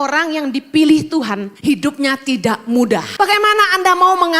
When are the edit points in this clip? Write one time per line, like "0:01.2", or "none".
0:01.5
0:03.1